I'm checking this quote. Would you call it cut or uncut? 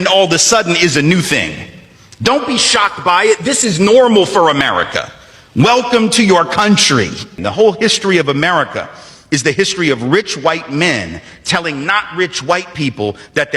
cut